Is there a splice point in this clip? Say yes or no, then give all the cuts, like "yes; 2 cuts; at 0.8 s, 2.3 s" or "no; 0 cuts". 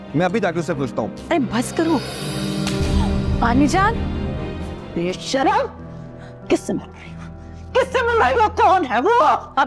yes; 1 cut; at 2.2 s